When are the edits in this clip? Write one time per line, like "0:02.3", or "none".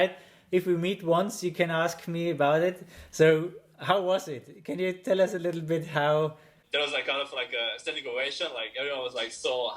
0:06.6